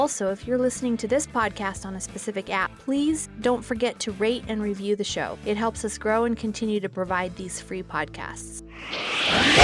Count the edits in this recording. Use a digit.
1